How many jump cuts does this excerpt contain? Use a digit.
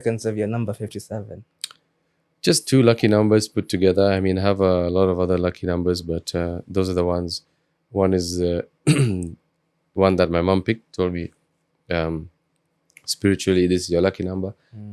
0